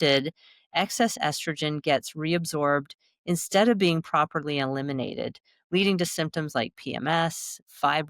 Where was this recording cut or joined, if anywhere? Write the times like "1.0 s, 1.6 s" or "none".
none